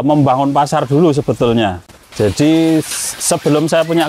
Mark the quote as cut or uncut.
uncut